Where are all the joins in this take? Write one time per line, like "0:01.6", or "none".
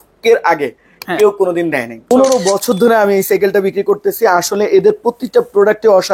0:02.0